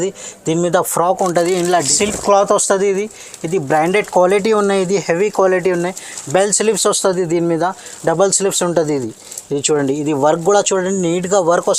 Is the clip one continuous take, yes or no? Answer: no